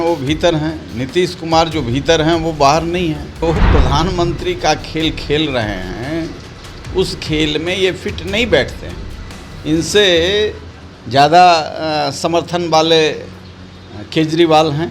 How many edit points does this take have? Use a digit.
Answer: 1